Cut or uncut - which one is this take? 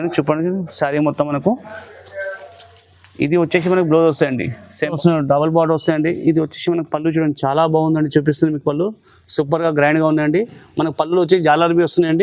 cut